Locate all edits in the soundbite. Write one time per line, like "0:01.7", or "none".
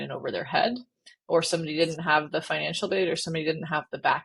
none